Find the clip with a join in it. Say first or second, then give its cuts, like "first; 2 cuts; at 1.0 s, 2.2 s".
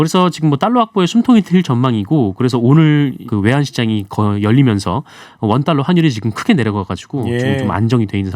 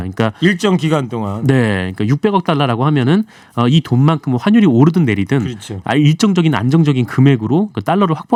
first; 1 cut; at 3.2 s